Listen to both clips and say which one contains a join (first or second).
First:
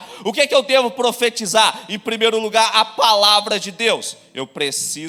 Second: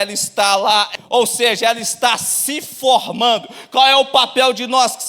second